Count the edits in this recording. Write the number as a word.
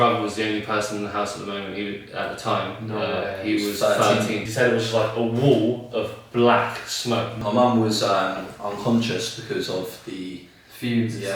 two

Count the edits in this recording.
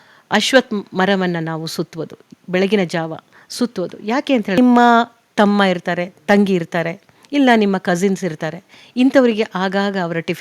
one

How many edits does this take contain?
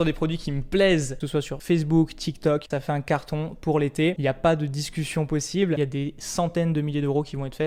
three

